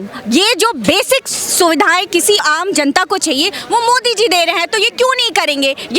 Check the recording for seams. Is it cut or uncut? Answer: cut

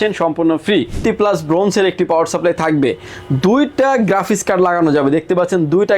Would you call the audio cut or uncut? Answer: cut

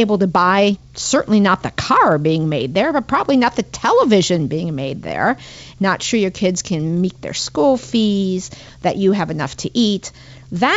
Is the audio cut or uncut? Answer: cut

